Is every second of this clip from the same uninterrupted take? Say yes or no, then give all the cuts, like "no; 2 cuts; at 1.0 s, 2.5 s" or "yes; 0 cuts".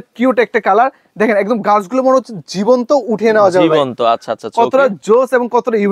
yes; 0 cuts